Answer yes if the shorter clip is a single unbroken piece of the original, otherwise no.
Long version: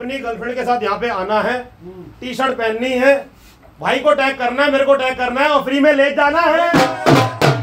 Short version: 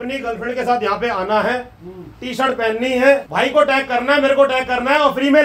no